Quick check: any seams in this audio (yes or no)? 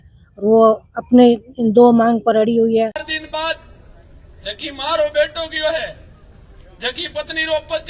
yes